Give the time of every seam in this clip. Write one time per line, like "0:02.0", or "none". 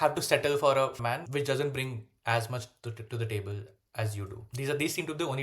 0:00.9
0:04.4